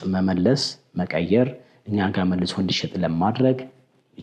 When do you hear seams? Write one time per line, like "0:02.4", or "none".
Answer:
none